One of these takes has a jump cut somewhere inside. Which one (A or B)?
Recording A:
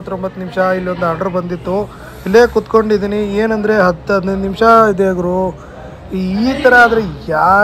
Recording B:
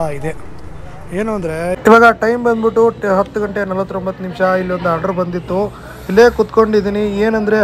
B